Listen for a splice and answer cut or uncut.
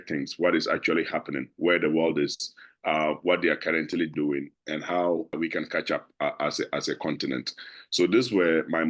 cut